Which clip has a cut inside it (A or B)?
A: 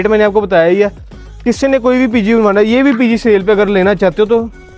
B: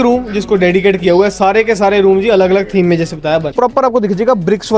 B